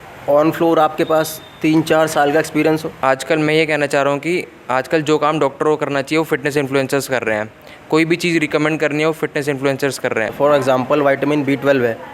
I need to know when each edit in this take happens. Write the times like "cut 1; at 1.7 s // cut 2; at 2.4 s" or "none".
cut 1; at 2.9 s // cut 2; at 10.3 s